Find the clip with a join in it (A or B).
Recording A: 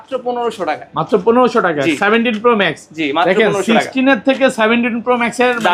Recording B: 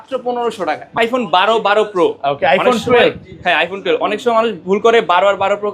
B